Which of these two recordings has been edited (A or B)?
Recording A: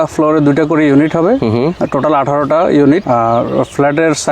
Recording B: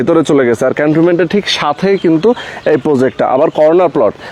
A